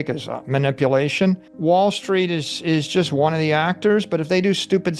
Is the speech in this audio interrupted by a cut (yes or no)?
yes